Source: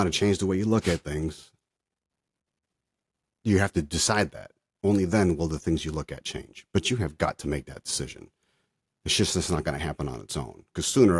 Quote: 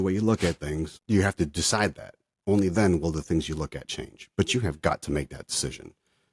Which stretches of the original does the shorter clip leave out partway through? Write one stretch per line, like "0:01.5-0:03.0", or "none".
0:01.4-0:03.3